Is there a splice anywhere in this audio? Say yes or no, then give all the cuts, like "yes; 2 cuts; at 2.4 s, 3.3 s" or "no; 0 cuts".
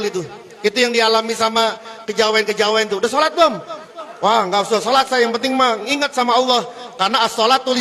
no; 0 cuts